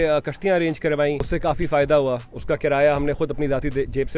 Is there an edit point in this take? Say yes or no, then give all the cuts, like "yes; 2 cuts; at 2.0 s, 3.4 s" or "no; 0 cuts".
yes; 1 cut; at 1.3 s